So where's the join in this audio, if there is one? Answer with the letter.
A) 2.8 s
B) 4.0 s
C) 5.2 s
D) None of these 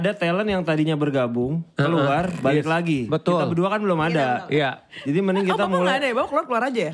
D